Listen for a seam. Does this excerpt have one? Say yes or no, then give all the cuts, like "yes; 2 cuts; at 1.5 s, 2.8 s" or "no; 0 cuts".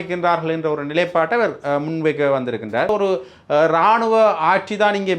yes; 1 cut; at 2.9 s